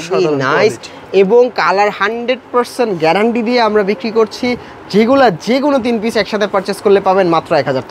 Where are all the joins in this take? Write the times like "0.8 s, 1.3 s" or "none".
none

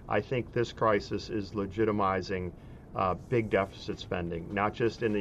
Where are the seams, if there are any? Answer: none

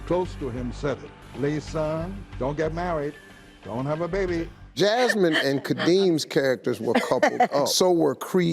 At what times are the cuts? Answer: 4.5 s

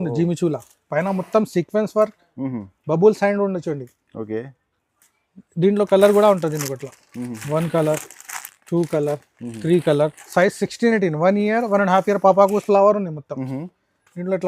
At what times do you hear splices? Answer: 12.6 s

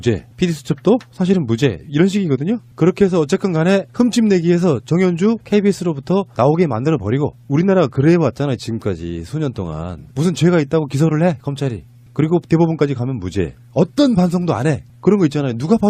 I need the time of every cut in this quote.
5.5 s

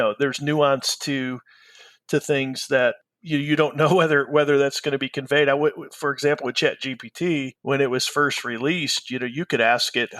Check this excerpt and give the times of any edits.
7.5 s

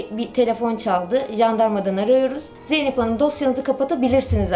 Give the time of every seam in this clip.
2.5 s

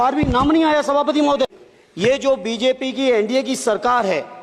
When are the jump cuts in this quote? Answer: 1.5 s

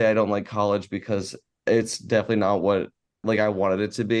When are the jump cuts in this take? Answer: 3.2 s

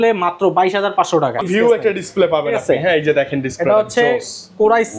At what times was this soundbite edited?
1.4 s

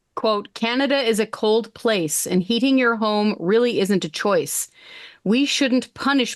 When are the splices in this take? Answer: none

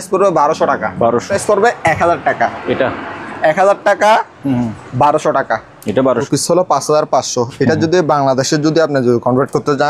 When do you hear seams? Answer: 1.3 s, 6.1 s

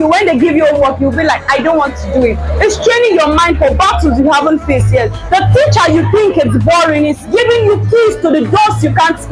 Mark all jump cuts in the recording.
none

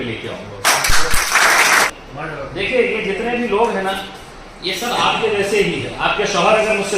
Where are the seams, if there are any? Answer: 1.9 s

